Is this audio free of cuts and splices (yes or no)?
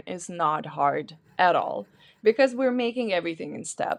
yes